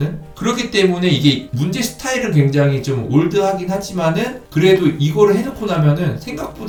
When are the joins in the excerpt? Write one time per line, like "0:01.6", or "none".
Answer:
none